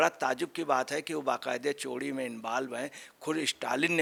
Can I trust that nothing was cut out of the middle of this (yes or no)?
yes